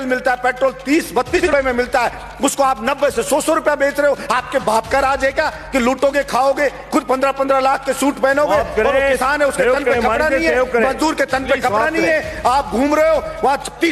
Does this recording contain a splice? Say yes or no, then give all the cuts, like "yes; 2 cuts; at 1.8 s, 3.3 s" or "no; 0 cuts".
yes; 1 cut; at 1.4 s